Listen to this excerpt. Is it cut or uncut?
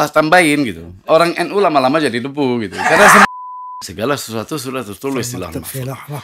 cut